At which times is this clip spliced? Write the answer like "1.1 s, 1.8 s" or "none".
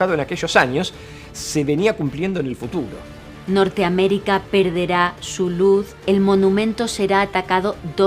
3.4 s, 5.9 s